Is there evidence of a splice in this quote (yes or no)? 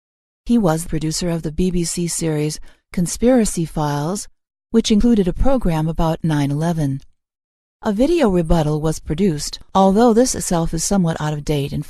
yes